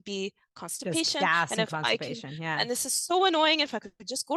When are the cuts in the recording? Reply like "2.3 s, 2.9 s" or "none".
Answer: none